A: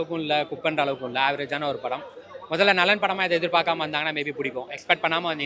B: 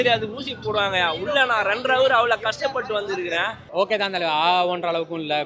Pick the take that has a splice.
B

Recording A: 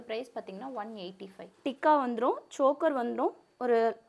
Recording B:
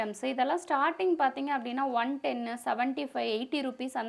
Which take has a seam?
A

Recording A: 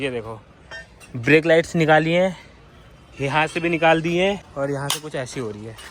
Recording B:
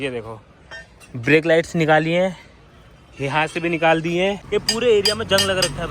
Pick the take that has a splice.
B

